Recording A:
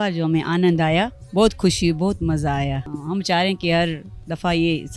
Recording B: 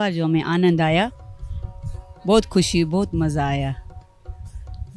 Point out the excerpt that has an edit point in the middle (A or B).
A